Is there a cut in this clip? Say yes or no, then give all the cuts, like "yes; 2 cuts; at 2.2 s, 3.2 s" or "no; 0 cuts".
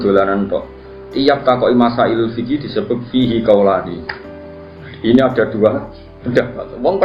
no; 0 cuts